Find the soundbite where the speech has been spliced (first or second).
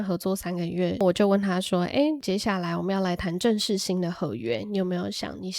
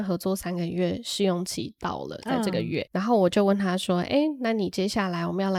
first